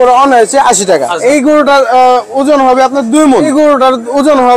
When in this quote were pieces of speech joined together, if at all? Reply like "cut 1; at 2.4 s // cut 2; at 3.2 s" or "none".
cut 1; at 1.1 s // cut 2; at 3.5 s